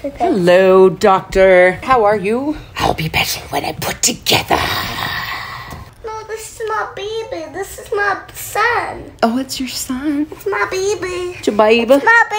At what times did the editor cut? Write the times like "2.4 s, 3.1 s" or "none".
1.8 s, 2.7 s